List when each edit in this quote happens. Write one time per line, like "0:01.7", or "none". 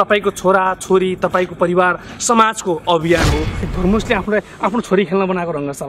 0:03.6

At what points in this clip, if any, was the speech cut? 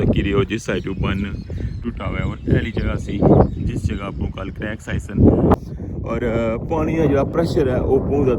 0:05.6

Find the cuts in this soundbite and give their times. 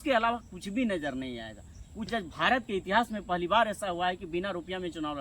0:02.1

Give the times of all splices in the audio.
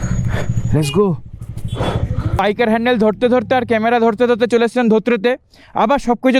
0:02.3

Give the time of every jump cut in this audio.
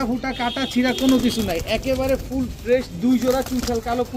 none

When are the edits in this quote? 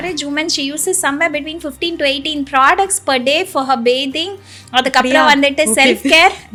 none

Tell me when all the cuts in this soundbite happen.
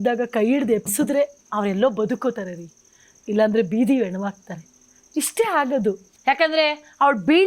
0:06.1

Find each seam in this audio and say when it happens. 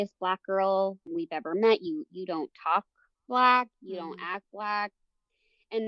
0:01.1

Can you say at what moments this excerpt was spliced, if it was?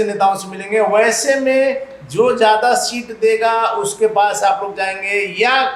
none

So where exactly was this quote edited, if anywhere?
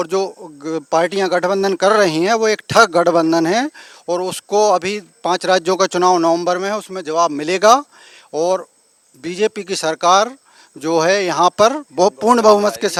none

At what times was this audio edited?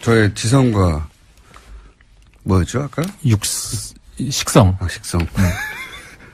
none

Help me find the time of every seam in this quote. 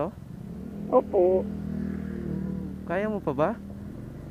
none

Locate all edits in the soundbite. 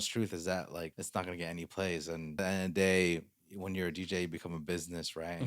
0:01.0
0:02.3

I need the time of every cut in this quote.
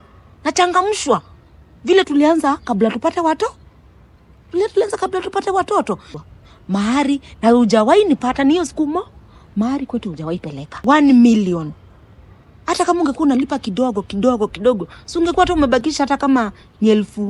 0:06.1
0:10.6

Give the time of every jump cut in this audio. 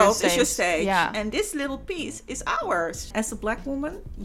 0:03.1

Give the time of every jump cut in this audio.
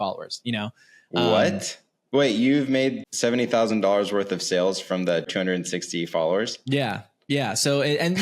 0:03.1
0:05.3

